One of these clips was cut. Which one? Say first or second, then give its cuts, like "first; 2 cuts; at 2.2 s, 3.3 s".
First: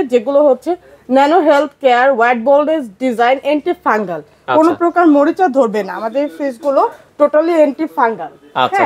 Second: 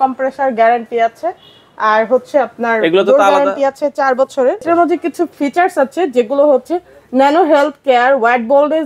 second; 1 cut; at 4.6 s